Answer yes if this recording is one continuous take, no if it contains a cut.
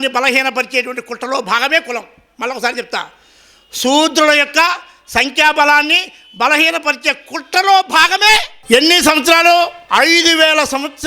no